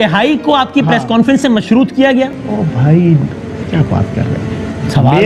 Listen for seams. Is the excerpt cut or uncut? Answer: uncut